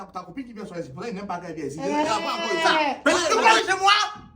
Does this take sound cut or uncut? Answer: cut